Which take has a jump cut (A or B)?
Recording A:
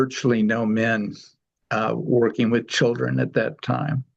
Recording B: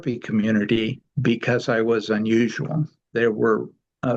B